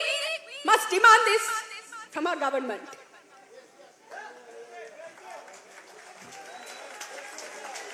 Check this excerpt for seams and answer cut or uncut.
uncut